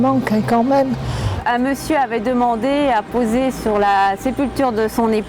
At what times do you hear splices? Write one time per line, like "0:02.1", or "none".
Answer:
0:01.4